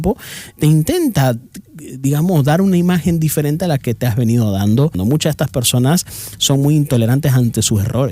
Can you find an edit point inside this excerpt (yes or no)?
yes